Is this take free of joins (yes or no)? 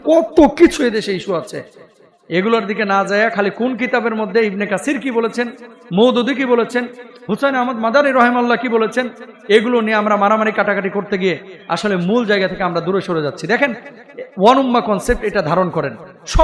yes